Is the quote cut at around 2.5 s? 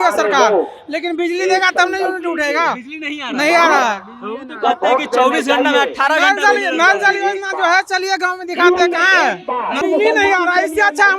no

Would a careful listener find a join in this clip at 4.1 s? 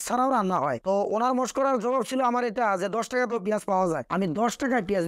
no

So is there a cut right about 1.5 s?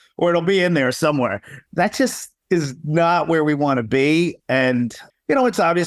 yes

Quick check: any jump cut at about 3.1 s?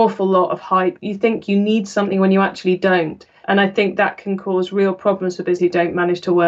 no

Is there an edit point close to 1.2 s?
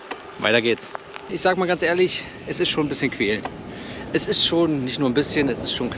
yes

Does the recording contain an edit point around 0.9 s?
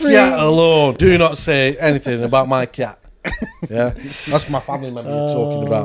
yes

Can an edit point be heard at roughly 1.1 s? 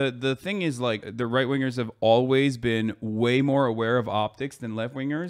yes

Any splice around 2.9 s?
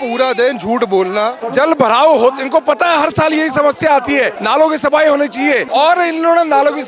no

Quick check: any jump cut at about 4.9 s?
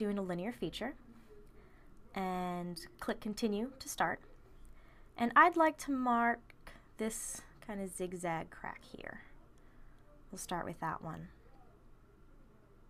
no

